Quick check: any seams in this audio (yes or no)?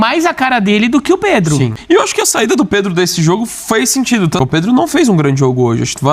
yes